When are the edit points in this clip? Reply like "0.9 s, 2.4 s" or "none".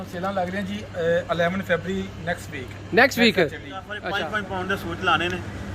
3.9 s